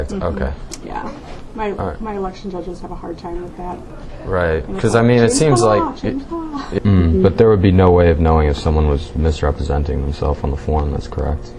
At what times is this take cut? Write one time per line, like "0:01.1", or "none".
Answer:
0:06.6